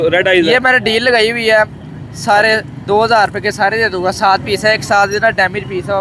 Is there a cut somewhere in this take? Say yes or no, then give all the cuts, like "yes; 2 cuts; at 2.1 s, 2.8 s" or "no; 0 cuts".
no; 0 cuts